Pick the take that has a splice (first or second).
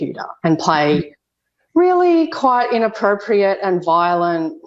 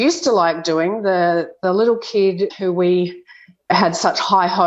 second